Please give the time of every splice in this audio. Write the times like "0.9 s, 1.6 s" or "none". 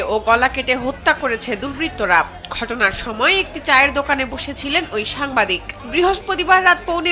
none